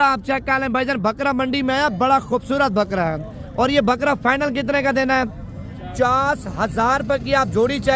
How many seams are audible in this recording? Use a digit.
1